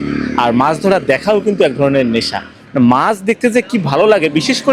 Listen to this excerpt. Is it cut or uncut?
uncut